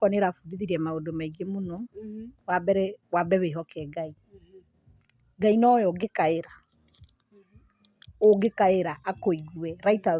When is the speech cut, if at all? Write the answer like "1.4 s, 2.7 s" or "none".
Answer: none